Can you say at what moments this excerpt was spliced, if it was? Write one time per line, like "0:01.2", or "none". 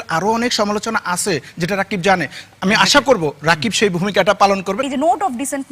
0:04.8